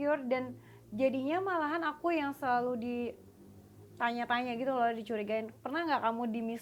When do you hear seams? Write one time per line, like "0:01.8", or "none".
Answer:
none